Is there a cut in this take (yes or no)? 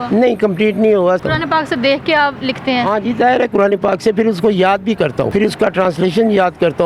yes